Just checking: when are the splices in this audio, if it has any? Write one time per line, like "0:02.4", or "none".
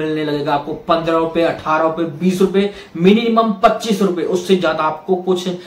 none